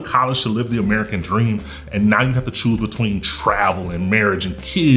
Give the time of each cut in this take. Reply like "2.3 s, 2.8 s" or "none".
none